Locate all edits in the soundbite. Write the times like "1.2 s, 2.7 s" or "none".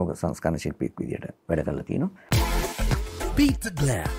2.2 s